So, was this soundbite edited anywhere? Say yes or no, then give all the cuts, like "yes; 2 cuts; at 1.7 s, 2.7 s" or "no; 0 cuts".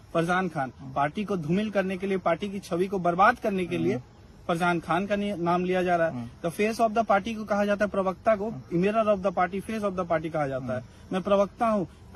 no; 0 cuts